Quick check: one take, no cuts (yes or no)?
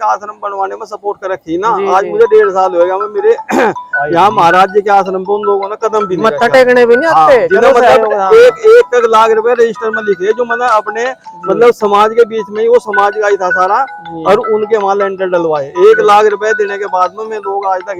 yes